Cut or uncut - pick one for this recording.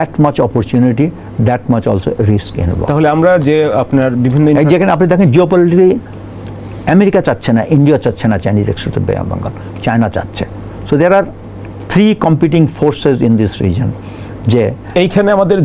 uncut